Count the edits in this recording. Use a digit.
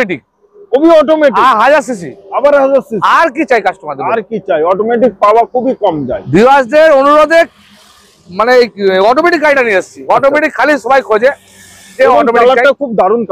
0